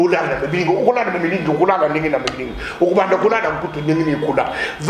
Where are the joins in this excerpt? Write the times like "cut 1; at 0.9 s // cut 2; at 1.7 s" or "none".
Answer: none